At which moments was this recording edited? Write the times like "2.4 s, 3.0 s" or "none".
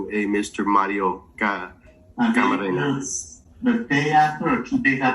none